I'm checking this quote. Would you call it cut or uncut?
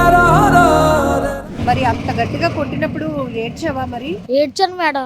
cut